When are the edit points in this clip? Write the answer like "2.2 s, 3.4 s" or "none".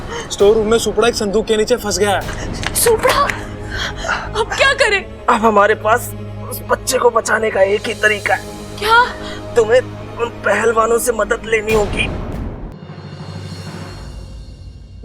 12.7 s